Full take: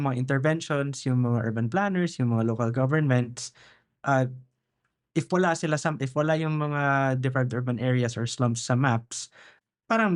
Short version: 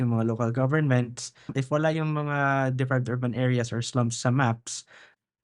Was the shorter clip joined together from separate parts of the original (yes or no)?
yes